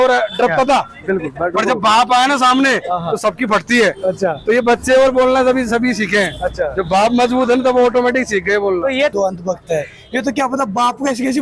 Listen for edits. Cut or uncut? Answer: cut